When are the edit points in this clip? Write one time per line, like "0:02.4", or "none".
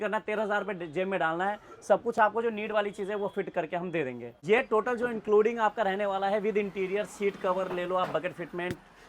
0:04.4